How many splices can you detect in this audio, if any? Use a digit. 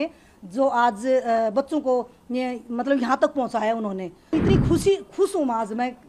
1